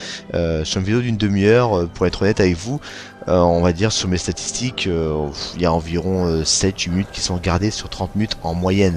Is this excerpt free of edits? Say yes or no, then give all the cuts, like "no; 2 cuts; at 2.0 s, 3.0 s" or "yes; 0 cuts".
no; 1 cut; at 2.7 s